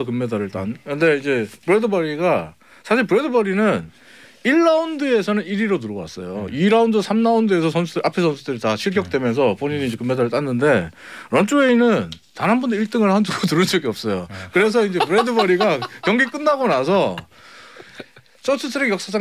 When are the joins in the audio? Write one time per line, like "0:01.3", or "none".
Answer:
none